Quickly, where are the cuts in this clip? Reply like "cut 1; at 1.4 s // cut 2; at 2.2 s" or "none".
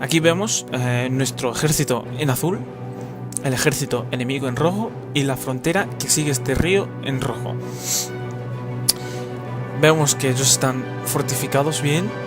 cut 1; at 1.4 s